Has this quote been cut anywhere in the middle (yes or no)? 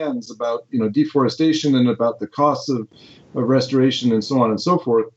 no